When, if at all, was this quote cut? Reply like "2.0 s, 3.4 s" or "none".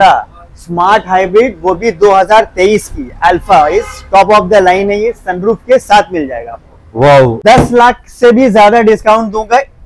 7.4 s